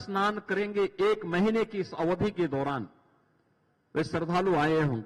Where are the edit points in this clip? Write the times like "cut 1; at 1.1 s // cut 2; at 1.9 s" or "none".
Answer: none